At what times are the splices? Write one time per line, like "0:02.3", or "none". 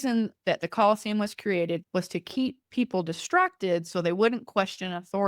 0:01.8